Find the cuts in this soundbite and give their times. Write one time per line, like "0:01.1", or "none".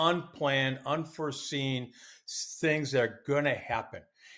none